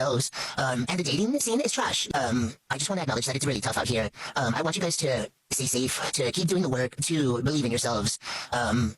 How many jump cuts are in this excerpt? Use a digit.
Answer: 1